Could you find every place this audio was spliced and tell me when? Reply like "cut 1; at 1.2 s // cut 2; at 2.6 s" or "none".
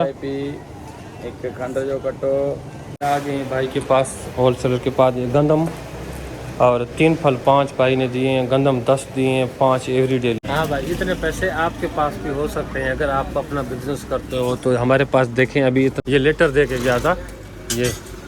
cut 1; at 2.8 s // cut 2; at 10.4 s // cut 3; at 16.0 s